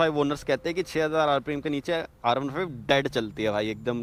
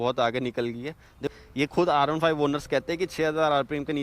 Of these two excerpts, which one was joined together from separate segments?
second; 1 cut; at 1.3 s

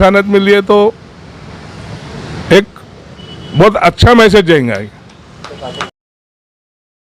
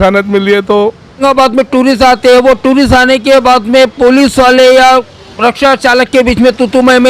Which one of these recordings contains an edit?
second; 1 cut; at 1.2 s

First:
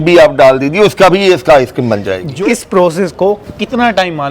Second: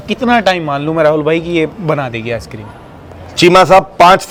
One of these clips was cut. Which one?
first; 1 cut; at 2.2 s

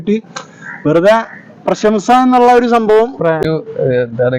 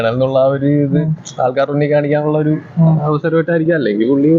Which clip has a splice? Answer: first; 1 cut; at 3.4 s

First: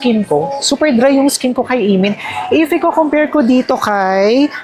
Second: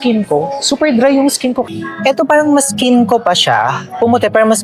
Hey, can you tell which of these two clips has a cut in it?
second; 1 cut; at 1.6 s

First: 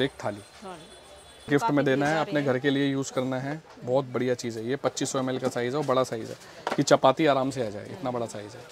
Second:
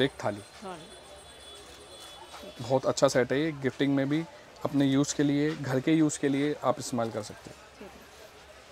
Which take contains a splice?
first; 1 cut; at 1.5 s

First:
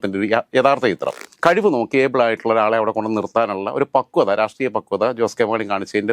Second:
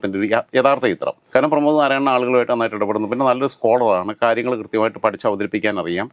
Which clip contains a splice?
first; 1 cut; at 1.2 s

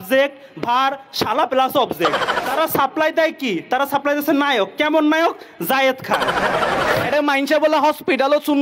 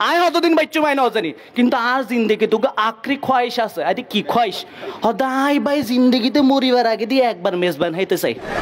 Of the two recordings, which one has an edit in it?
first; 2 cuts; at 2.4 s, 7.0 s

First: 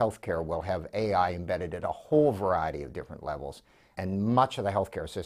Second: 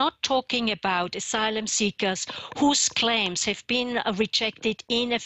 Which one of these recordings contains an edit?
first; 1 cut; at 3.9 s

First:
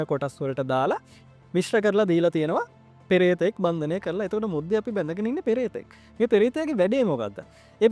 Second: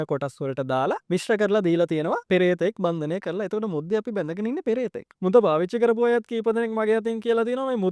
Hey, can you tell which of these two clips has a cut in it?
second; 3 cuts; at 1.0 s, 2.2 s, 5.0 s

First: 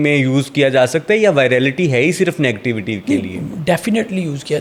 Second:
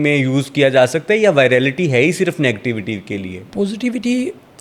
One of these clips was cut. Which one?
second; 1 cut; at 3.1 s

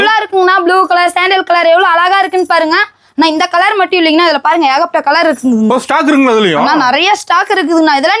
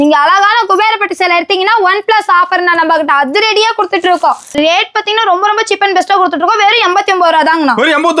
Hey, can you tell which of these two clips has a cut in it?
second; 1 cut; at 4.5 s

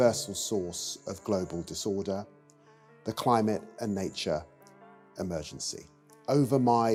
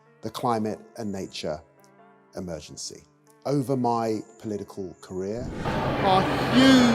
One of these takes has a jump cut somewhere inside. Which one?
second; 1 cut; at 5.5 s

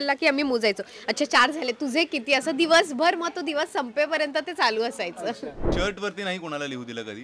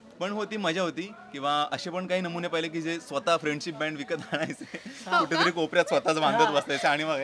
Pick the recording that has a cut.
first; 1 cut; at 5.7 s

